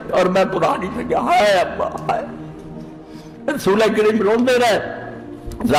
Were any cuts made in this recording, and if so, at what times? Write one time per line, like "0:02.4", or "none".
none